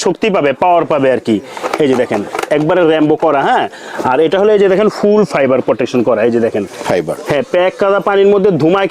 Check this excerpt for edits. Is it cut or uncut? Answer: uncut